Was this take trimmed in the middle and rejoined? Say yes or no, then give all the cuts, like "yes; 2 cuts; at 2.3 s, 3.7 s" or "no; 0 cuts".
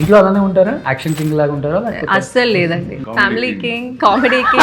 yes; 2 cuts; at 0.9 s, 3.0 s